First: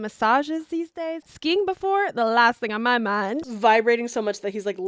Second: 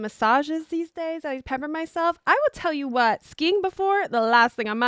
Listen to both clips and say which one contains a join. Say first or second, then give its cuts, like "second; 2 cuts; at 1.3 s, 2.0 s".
first; 2 cuts; at 1.3 s, 3.4 s